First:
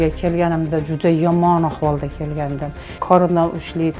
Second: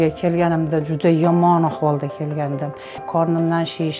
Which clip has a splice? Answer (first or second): first